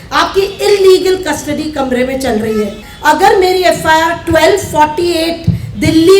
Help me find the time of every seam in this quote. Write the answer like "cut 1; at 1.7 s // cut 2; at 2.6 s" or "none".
cut 1; at 2.9 s

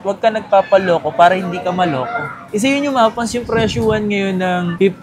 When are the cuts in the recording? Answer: cut 1; at 2.4 s

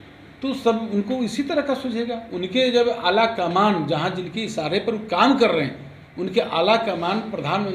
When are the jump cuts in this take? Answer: none

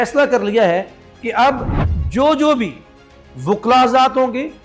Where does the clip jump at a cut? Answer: none

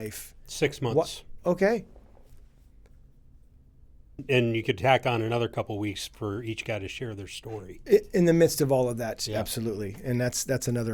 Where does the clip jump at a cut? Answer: cut 1; at 4.2 s

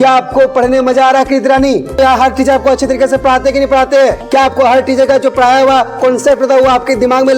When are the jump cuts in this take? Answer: cut 1; at 2.0 s // cut 2; at 4.2 s

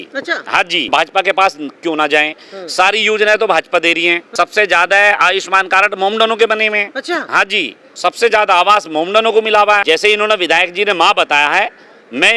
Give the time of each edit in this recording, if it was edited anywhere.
cut 1; at 0.9 s // cut 2; at 4.2 s // cut 3; at 7.8 s // cut 4; at 9.8 s

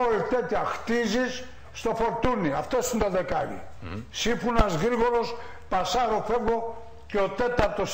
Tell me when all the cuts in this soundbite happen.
cut 1; at 5.0 s

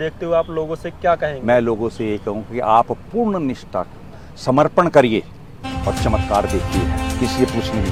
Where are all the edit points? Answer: none

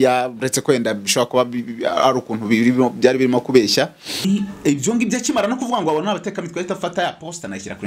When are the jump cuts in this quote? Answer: cut 1; at 4.2 s

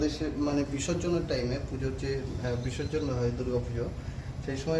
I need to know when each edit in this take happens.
none

